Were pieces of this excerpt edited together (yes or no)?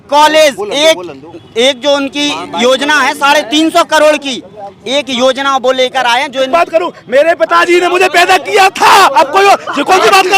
yes